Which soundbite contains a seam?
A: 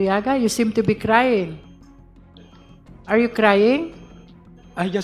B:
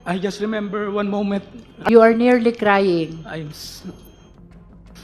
B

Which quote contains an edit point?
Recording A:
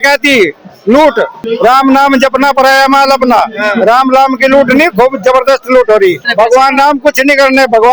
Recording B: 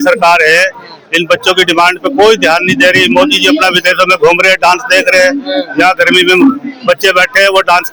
A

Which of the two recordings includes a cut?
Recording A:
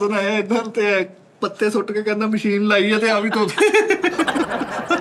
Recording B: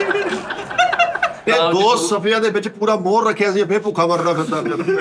B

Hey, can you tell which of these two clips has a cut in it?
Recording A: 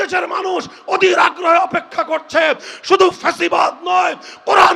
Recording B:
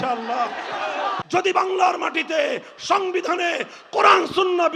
B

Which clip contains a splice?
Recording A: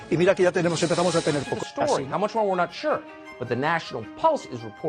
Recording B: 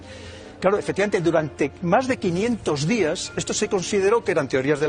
A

